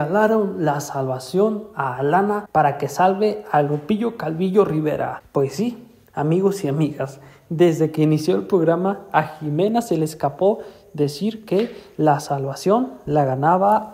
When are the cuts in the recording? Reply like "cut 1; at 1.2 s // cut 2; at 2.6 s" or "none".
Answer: cut 1; at 2.4 s // cut 2; at 5.2 s